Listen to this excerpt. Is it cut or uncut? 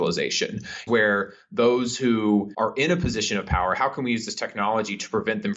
cut